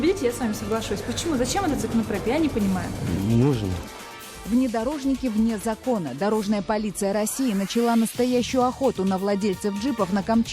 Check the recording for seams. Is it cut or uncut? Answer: cut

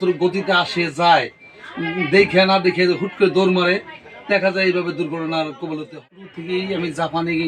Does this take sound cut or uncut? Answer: cut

